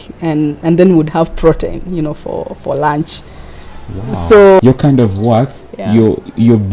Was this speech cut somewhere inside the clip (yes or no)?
yes